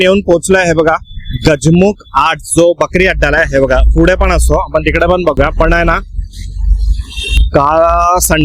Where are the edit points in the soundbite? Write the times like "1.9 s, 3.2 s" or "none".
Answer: none